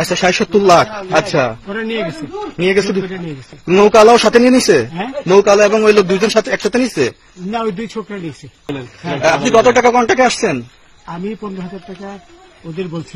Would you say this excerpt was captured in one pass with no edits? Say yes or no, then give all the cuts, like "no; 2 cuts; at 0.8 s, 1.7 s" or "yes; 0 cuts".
no; 1 cut; at 8.7 s